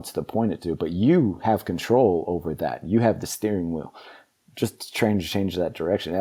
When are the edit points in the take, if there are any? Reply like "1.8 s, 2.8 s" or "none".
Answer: none